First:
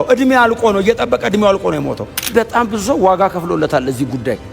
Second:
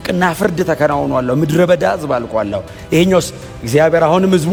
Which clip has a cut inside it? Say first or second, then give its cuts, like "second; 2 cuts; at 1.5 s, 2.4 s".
first; 1 cut; at 2.1 s